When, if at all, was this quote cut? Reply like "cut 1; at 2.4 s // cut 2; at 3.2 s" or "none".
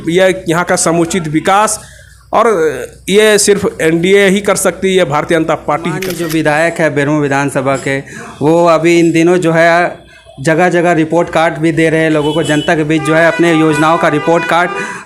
cut 1; at 6.1 s

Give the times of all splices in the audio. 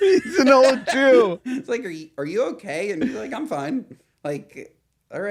none

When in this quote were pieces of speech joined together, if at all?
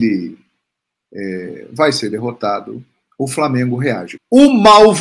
cut 1; at 4.1 s

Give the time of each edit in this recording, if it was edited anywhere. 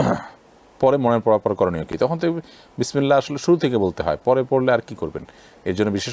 none

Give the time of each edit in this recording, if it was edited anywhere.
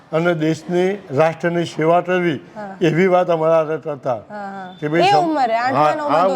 none

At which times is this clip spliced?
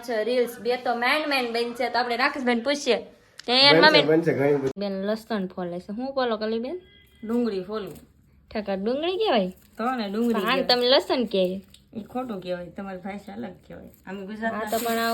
cut 1; at 4.7 s

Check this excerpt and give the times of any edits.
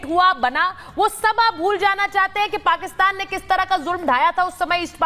none

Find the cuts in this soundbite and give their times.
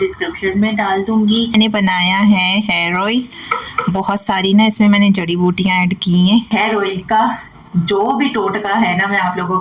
cut 1; at 1.5 s // cut 2; at 6.5 s

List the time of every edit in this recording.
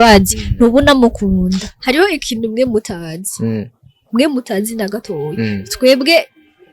cut 1; at 1.7 s

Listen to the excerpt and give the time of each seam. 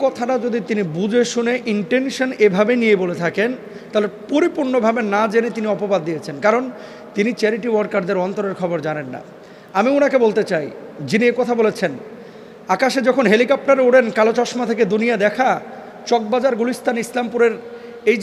none

